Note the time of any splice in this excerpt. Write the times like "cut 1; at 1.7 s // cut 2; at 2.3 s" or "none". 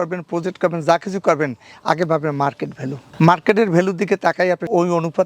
none